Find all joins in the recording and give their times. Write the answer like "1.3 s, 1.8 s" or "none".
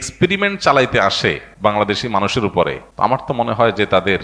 1.5 s, 2.8 s